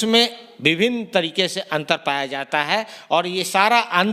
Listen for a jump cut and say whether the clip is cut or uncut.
uncut